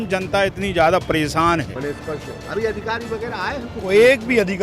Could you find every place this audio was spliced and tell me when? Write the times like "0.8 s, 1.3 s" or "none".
1.7 s